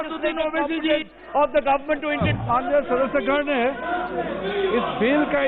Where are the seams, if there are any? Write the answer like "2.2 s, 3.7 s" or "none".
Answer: 2.5 s